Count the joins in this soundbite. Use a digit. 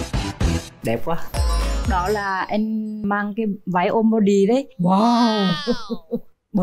2